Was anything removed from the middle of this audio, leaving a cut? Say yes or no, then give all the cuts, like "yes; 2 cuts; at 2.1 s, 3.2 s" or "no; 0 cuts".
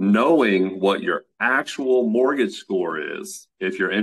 no; 0 cuts